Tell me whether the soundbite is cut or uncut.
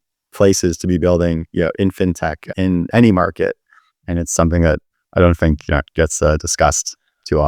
uncut